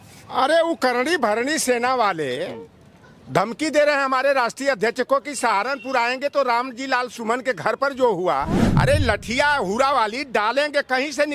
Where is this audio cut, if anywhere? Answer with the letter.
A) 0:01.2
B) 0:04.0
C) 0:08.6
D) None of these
C